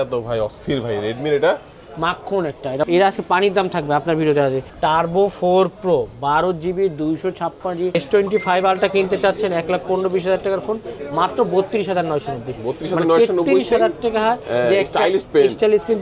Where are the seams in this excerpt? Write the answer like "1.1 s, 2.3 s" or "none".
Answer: 2.9 s, 4.7 s, 7.9 s

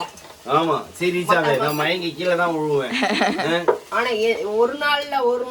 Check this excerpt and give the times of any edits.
3.9 s

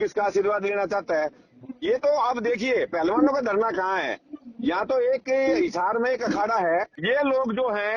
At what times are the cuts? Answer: 6.9 s

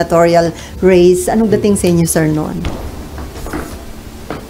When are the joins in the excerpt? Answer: 2.6 s

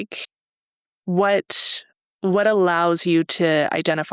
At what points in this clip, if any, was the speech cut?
none

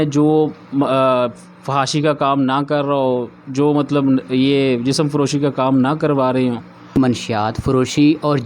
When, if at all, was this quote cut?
7.0 s

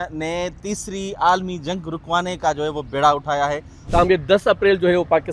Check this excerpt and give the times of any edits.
3.7 s

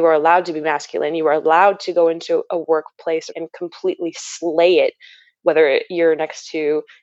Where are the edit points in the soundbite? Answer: 3.3 s

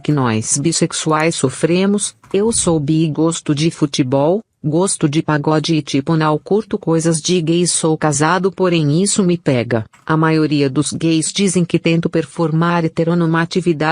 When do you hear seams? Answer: 8.8 s

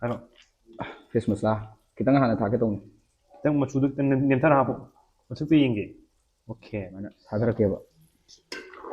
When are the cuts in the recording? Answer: 7.2 s

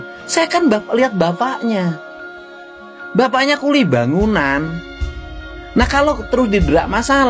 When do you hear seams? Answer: none

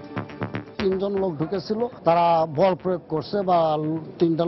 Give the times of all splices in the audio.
0.8 s, 1.9 s

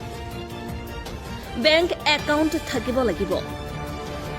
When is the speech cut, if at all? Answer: 1.4 s

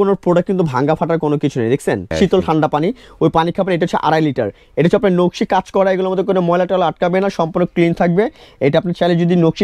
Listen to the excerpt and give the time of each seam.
2.1 s

